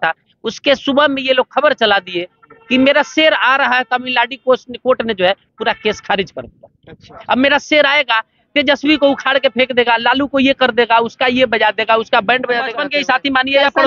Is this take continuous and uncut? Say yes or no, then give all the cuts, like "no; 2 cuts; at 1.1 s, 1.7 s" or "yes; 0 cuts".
no; 1 cut; at 12.8 s